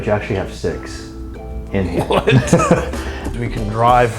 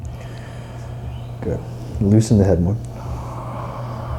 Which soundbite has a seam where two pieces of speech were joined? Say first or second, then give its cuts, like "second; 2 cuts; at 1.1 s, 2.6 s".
first; 1 cut; at 3.2 s